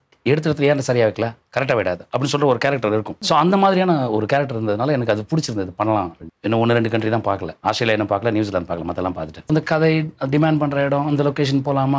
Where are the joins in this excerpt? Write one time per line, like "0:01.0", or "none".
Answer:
0:03.1
0:06.2
0:07.5
0:09.4

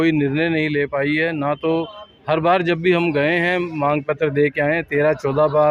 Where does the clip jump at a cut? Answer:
none

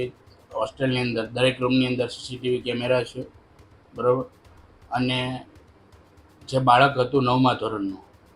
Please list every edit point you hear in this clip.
none

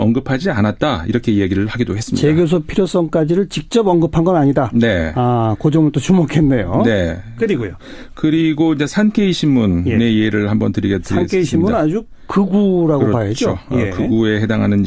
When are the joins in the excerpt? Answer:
none

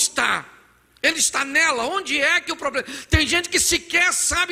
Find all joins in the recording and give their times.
none

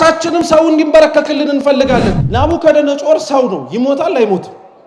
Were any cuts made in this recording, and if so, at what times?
0:02.2

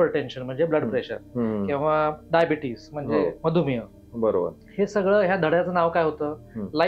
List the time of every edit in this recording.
none

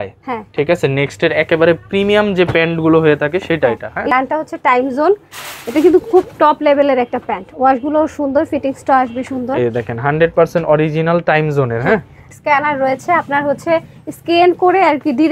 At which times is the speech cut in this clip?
0:04.1
0:12.2

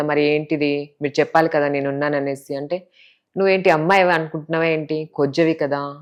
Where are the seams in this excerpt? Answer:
none

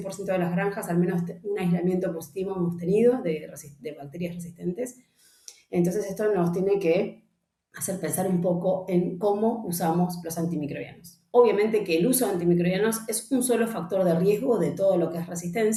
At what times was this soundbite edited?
none

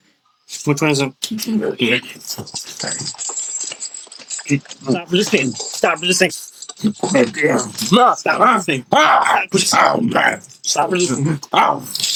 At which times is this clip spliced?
none

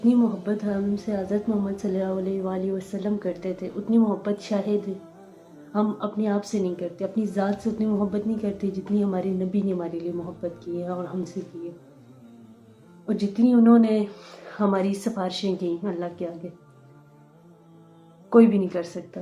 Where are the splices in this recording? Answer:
none

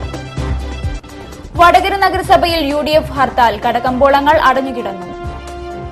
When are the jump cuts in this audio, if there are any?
0:01.0

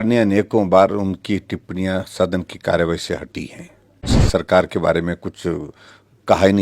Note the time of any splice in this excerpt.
0:04.2

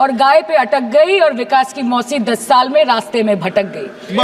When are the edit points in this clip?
none

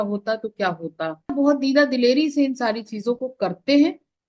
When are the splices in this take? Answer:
0:01.3

